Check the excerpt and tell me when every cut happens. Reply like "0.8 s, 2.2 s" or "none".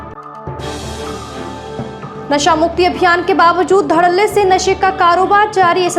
none